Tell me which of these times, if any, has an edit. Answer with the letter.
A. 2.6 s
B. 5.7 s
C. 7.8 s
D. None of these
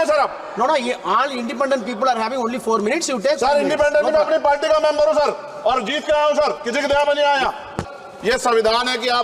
C